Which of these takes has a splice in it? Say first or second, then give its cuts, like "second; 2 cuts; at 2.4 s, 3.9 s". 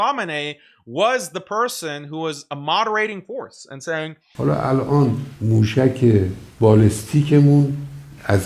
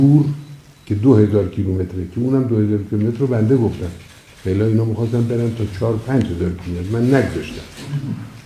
first; 1 cut; at 4.2 s